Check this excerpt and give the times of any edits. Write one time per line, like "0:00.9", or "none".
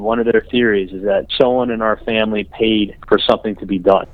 none